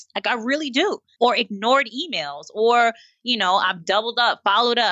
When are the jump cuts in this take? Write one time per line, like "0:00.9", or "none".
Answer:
0:01.1